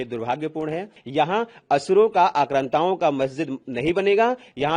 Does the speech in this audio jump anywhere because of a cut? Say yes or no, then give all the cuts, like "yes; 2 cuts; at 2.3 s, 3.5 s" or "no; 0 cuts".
yes; 1 cut; at 1.0 s